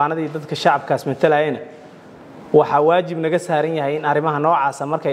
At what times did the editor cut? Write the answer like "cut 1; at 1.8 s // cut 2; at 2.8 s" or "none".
none